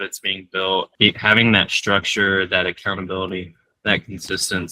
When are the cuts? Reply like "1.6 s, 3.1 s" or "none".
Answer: 0.9 s